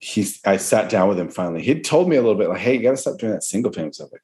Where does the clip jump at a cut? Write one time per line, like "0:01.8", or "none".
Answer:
none